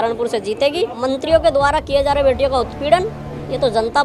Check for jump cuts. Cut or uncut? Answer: cut